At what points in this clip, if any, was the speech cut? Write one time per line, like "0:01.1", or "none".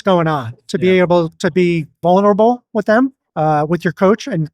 0:01.9
0:03.2

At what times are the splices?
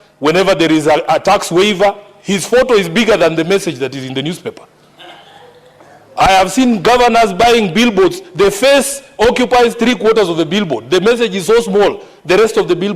none

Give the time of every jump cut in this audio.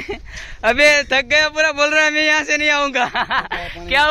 none

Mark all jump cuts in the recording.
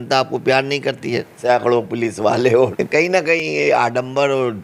0:01.3
0:03.1

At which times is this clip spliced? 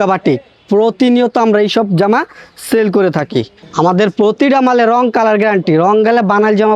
0:03.6

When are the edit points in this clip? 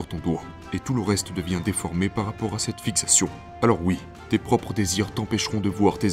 0:03.4

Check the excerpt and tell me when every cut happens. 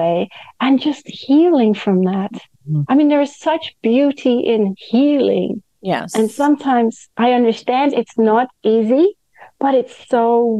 none

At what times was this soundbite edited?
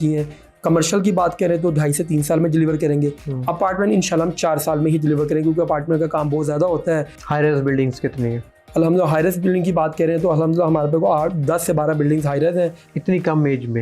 0:07.1
0:12.8

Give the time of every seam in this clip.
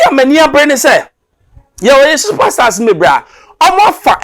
none

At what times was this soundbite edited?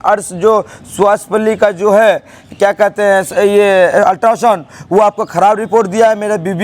none

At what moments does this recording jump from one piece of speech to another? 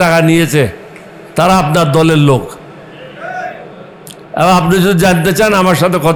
none

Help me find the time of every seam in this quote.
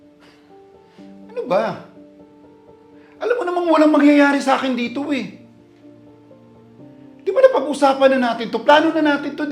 0:00.8
0:01.9
0:03.2

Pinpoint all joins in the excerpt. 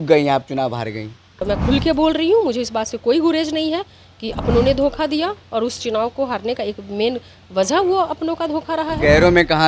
0:01.4

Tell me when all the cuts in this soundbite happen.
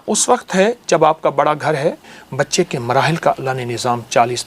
0:02.1

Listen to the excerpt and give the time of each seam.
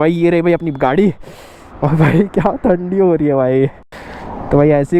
none

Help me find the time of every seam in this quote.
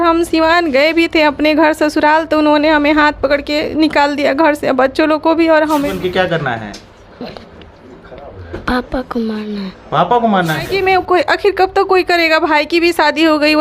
0:05.9
0:10.7

